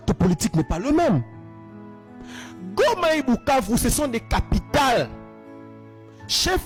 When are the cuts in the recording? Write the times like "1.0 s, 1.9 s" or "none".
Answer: none